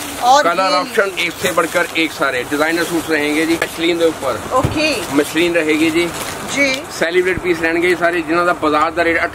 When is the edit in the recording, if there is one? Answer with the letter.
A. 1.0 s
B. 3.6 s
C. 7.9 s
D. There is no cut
B